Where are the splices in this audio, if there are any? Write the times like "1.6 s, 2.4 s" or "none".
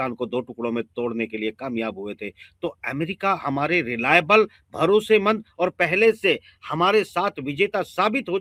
none